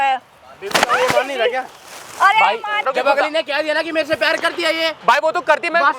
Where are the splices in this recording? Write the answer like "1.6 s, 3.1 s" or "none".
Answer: 2.9 s